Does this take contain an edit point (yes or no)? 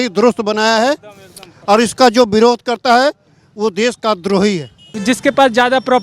yes